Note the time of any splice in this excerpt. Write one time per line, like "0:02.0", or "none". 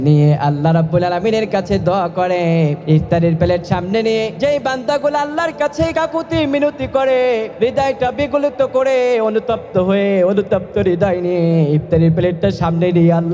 0:02.8
0:04.3

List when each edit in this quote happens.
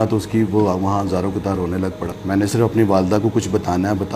0:02.2

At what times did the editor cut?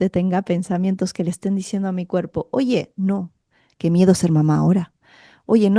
none

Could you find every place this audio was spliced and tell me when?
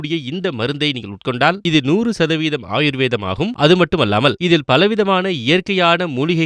0:01.6

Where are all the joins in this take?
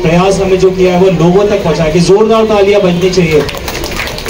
none

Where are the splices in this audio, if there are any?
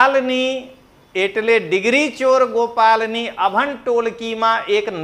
none

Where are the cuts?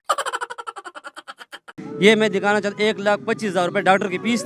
0:01.8

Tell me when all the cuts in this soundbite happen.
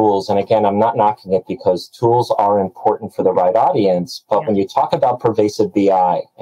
none

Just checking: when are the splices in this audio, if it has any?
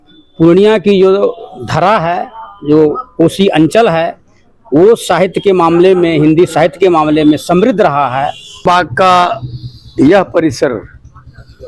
0:08.6

